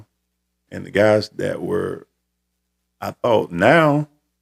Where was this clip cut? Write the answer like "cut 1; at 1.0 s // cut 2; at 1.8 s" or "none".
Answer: none